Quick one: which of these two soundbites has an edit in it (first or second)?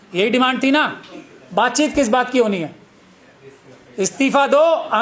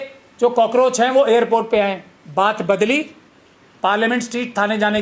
second